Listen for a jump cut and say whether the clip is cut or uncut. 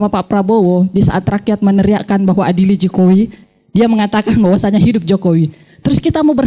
uncut